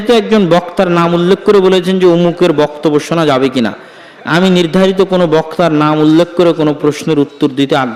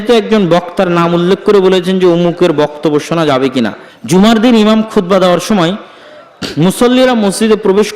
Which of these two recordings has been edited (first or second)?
second